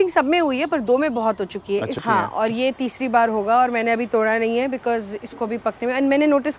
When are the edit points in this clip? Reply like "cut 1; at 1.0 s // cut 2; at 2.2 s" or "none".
cut 1; at 2.0 s